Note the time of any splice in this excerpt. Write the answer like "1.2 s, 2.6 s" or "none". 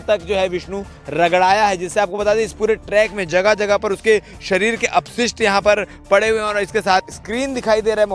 7.1 s